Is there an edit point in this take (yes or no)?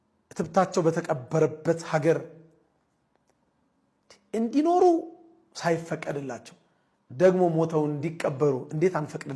no